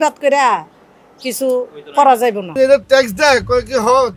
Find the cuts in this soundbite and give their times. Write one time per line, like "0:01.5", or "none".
0:02.5